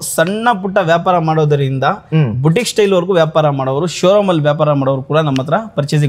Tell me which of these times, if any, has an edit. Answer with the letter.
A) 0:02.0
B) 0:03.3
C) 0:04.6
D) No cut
D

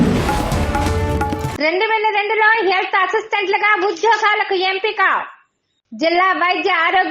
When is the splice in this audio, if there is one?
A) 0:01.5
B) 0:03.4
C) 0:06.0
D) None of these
A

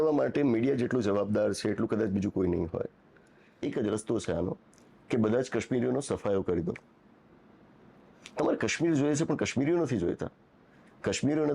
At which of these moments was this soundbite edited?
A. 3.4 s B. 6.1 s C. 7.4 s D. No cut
A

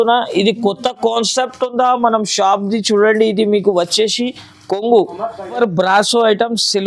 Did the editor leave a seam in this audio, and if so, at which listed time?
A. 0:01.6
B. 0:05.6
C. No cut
B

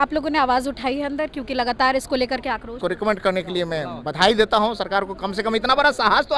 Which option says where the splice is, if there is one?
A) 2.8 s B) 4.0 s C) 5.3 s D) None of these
A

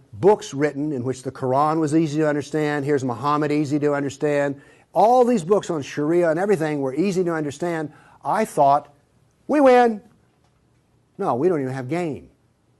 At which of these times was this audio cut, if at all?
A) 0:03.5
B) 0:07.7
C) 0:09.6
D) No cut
B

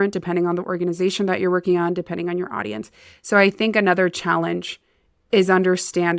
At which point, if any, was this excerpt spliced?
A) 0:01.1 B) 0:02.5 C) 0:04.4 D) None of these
D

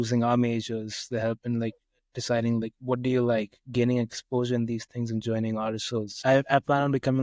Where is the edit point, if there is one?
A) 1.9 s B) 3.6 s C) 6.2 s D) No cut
C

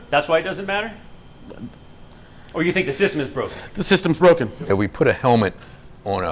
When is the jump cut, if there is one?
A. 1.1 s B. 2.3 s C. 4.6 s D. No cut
C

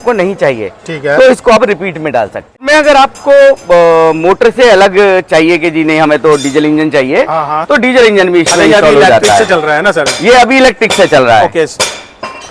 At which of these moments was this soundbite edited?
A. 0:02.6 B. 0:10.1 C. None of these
A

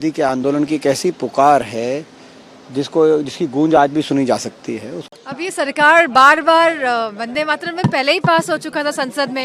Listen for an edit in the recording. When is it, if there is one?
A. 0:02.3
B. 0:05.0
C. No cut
B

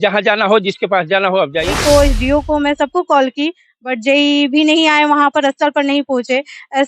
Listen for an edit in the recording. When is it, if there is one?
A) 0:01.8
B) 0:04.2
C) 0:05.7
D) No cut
A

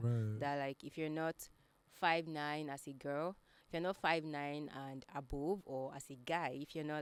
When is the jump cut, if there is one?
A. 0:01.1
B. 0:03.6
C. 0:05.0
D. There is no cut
D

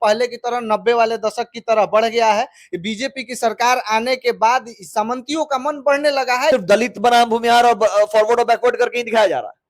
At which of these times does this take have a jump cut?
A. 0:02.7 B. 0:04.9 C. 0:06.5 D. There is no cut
C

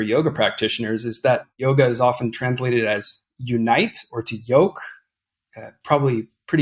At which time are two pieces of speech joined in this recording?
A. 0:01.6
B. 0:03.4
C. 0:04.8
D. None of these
A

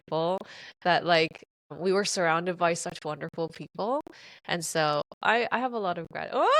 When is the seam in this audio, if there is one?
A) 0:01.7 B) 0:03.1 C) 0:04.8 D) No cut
A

